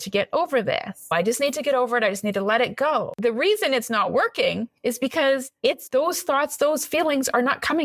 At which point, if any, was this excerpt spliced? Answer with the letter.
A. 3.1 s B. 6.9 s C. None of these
A